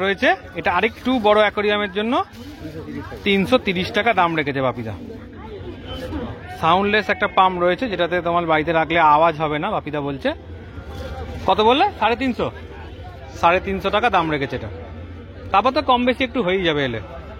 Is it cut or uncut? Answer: uncut